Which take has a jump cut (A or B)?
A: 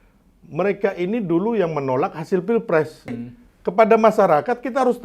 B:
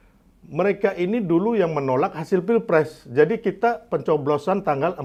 A